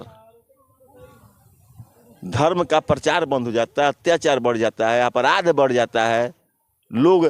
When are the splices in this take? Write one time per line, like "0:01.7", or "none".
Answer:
none